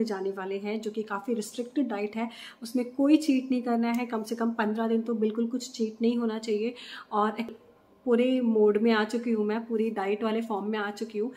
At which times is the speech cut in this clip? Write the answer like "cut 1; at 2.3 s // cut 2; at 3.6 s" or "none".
cut 1; at 7.5 s